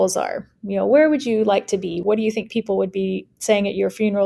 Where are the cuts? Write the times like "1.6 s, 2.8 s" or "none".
2.0 s